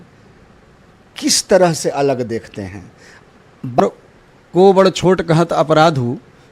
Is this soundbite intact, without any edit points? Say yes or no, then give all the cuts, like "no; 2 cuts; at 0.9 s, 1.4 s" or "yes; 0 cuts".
no; 1 cut; at 3.8 s